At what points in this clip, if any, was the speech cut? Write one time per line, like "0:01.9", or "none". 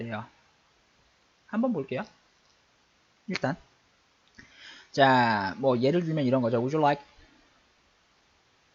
0:01.4